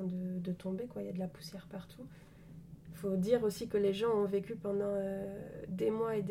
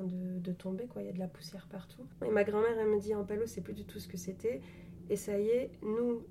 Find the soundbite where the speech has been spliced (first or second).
second